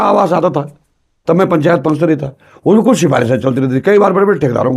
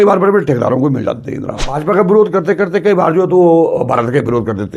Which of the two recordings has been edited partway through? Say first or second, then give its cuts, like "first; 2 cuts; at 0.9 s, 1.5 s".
second; 1 cut; at 1.7 s